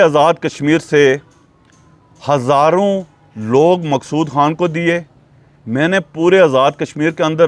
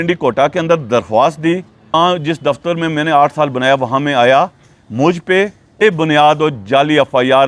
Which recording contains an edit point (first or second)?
second